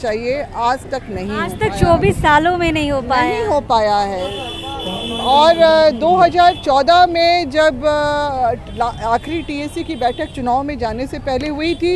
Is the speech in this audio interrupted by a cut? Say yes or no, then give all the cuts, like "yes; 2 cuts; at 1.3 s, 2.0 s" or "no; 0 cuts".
no; 0 cuts